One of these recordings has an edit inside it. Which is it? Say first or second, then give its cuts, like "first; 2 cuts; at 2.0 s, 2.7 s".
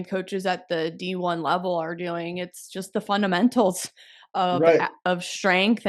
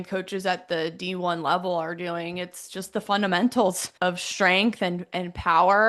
second; 1 cut; at 3.9 s